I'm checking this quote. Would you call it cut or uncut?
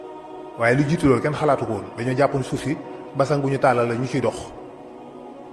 uncut